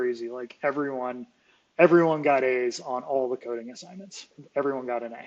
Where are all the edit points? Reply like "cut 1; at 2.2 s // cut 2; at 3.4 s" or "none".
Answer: cut 1; at 4.3 s